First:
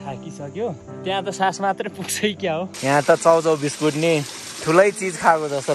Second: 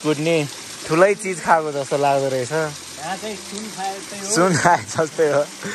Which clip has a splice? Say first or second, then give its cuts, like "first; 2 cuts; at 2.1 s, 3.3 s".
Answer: first; 2 cuts; at 0.9 s, 2.7 s